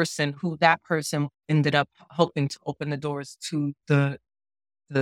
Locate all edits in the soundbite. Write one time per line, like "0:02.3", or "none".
none